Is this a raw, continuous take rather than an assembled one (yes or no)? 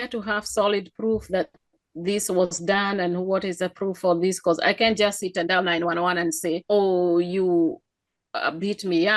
no